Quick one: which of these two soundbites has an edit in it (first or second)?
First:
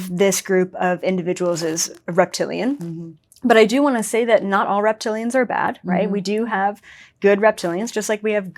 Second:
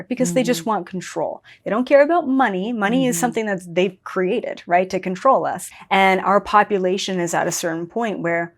second